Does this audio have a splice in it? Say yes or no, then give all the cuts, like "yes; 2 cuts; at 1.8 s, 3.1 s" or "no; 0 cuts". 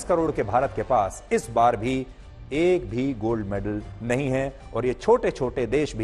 no; 0 cuts